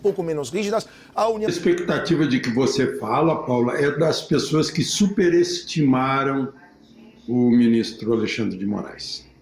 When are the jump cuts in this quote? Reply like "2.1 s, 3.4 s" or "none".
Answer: 1.5 s